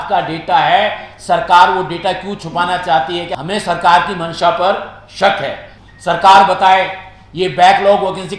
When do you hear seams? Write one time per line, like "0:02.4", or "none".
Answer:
0:03.3
0:05.7